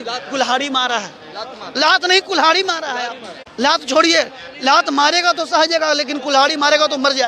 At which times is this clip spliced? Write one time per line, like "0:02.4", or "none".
none

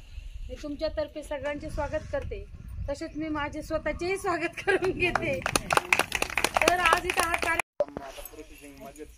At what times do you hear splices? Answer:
0:07.7

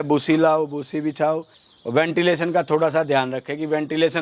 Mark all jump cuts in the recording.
0:01.5

